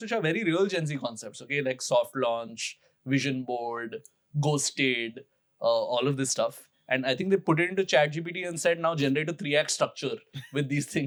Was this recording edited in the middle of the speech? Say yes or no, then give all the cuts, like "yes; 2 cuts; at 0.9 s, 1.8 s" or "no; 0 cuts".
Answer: no; 0 cuts